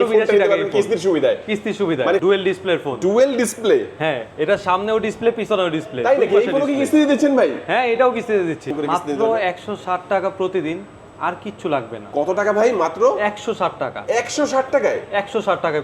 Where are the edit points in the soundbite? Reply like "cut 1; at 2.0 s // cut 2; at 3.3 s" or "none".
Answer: cut 1; at 2.2 s // cut 2; at 8.7 s